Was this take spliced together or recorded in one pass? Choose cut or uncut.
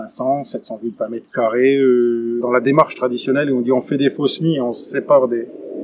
cut